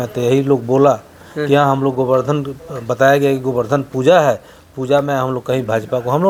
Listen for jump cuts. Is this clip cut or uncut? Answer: uncut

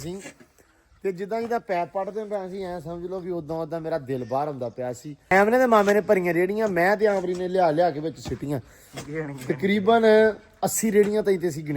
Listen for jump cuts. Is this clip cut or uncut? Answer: cut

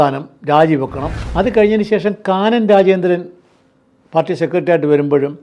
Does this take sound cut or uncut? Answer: cut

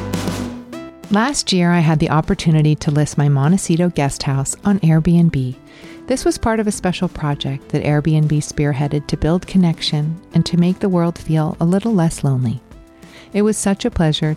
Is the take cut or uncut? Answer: cut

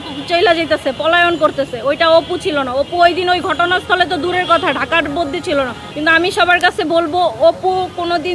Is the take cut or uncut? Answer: cut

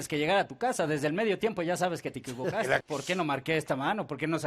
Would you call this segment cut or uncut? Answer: cut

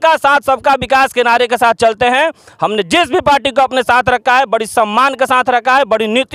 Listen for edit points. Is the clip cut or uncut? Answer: uncut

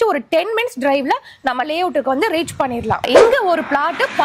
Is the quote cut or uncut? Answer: cut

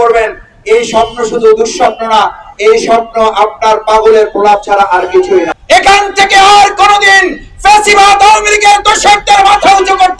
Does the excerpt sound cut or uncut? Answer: cut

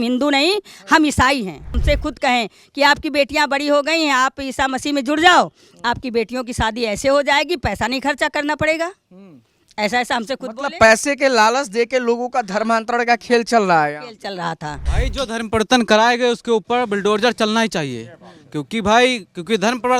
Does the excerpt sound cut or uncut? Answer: cut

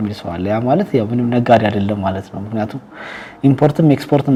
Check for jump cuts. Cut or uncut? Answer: uncut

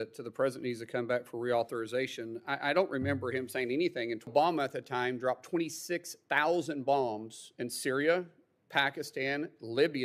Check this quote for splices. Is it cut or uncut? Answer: cut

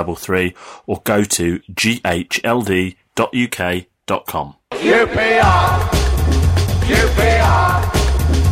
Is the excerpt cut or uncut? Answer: cut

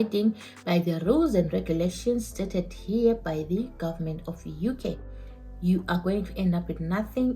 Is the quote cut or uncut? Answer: cut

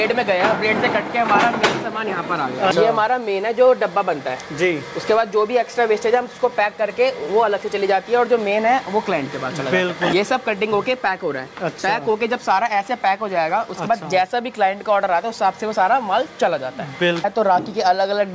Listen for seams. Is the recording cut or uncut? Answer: cut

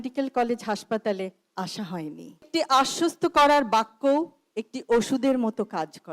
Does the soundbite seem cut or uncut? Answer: cut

